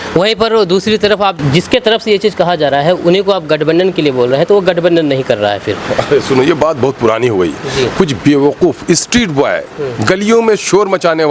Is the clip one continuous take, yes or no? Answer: no